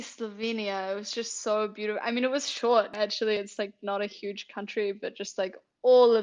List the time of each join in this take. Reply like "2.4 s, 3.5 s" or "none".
none